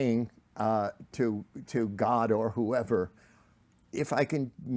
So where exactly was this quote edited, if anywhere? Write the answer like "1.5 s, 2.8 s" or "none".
3.8 s

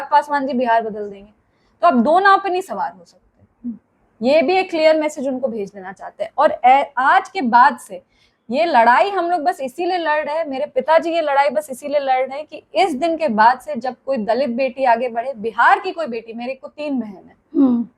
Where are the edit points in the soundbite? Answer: none

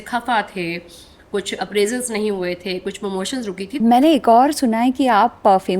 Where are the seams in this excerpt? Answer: 3.8 s

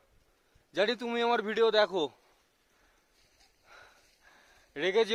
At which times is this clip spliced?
none

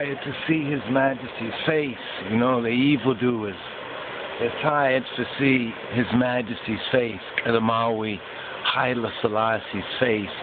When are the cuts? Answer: none

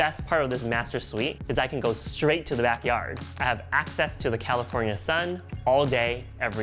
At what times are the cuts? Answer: 1.4 s, 3.3 s

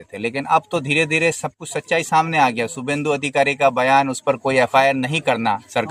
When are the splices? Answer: none

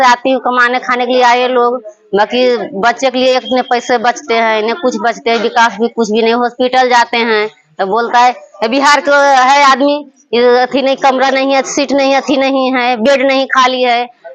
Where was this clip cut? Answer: none

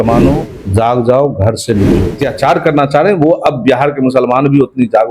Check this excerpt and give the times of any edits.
2.1 s

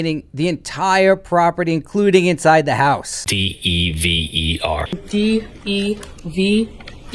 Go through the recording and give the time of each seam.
3.2 s

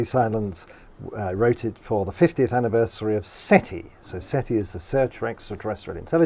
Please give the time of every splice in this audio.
4.9 s

